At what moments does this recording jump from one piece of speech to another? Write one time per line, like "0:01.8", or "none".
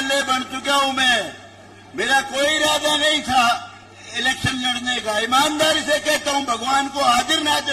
none